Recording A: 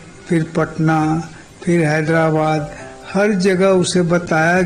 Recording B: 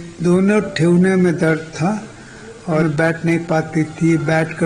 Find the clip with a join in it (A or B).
B